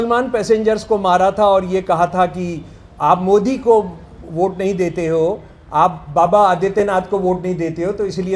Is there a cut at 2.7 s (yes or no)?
no